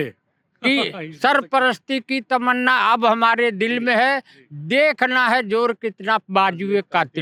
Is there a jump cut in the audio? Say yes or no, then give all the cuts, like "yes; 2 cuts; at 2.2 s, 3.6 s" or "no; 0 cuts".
no; 0 cuts